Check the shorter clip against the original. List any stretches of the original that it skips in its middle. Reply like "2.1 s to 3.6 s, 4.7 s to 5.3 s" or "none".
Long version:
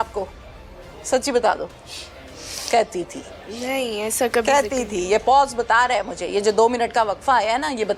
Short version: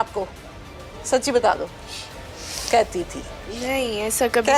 none